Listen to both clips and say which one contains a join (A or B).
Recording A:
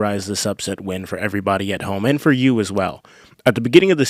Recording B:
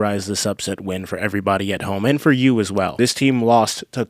B